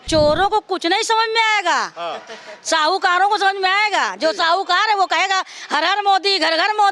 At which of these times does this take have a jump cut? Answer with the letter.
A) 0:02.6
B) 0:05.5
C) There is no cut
C